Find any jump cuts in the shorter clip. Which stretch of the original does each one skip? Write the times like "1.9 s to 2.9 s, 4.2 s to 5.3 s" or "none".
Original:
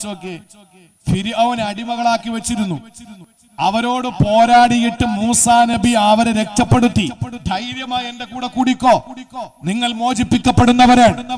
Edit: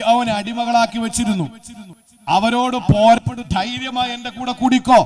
4.5 s to 7.1 s